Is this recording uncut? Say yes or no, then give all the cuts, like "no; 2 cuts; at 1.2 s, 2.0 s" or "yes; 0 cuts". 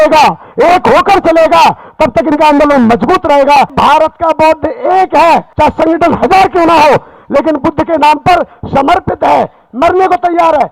no; 2 cuts; at 3.7 s, 5.5 s